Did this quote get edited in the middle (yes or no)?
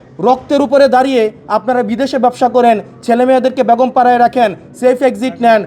no